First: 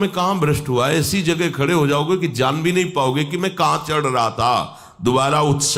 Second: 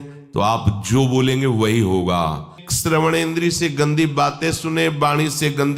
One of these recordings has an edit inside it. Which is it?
second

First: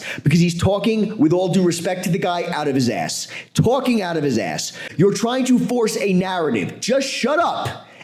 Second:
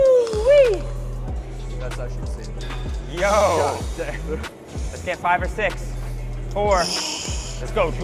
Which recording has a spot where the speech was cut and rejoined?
first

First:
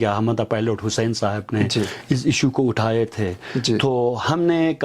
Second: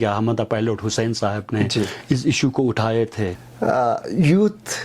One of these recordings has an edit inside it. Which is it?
second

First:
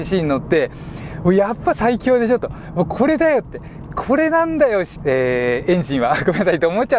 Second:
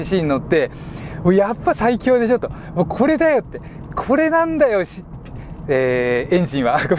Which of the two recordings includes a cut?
first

